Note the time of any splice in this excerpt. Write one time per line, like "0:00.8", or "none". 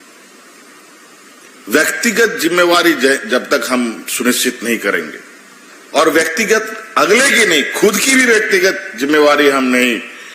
none